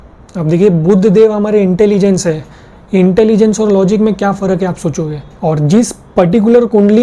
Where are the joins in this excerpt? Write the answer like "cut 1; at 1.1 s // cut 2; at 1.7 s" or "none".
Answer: cut 1; at 5.3 s